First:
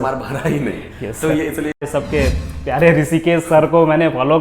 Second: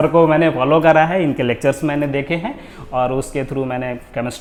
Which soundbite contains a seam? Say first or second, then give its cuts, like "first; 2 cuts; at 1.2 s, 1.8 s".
first; 1 cut; at 1.8 s